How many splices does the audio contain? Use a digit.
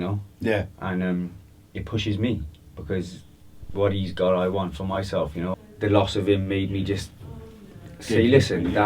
1